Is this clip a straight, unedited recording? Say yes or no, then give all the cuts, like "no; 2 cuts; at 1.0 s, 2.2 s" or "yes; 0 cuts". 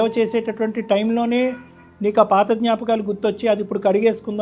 yes; 0 cuts